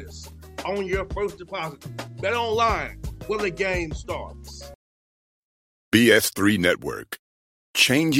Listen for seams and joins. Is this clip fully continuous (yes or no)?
no